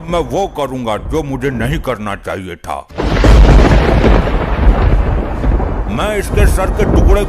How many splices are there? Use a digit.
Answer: 1